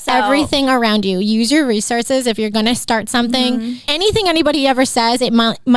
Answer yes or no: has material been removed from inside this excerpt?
yes